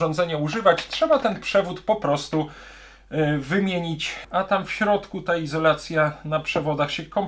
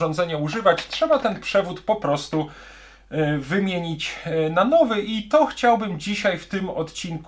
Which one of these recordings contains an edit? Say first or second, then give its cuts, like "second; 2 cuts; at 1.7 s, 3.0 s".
first; 1 cut; at 4.2 s